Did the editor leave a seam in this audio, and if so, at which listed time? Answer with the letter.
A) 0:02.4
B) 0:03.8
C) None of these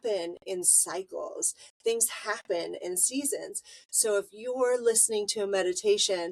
C